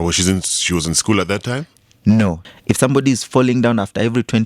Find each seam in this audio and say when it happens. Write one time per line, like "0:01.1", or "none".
0:02.4